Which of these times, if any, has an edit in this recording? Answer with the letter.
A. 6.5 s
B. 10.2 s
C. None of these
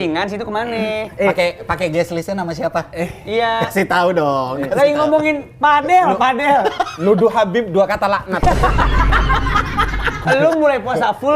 B